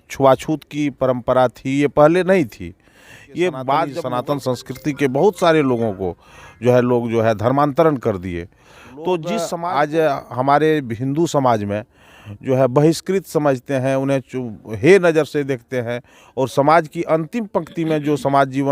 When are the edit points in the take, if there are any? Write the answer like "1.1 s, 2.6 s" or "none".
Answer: 4.0 s, 9.6 s

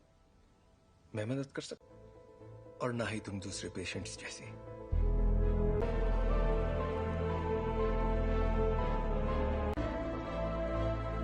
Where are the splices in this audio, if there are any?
5.8 s

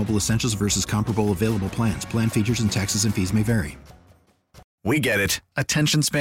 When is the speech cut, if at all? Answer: 4.6 s

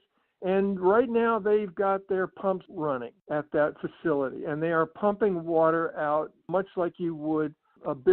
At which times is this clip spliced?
2.8 s

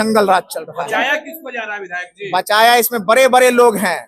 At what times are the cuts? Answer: none

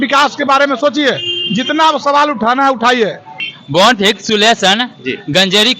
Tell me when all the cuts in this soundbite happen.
3.4 s

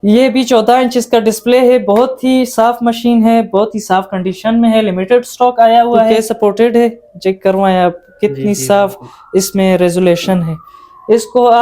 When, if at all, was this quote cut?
6.1 s

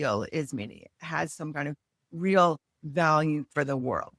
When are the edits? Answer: none

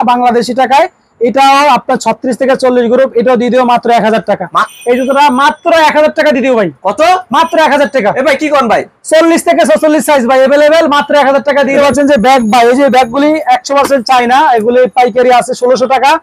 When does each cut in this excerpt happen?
4.7 s, 11.7 s

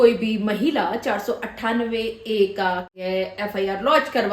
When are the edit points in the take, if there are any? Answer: 2.9 s

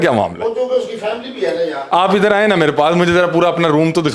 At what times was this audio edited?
none

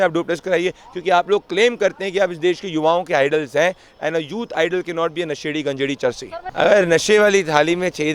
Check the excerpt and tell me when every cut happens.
6.3 s

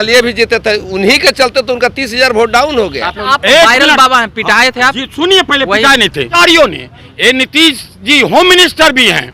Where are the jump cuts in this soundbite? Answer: 3.2 s, 6.3 s

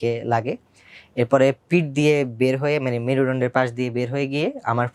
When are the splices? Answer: none

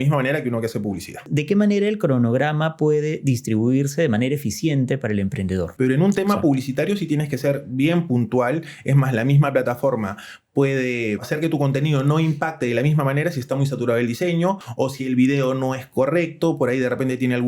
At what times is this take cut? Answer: 1.3 s, 5.7 s, 11.3 s, 14.7 s

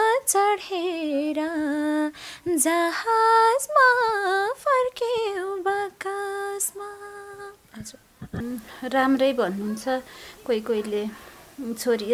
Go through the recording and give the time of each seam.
8.4 s

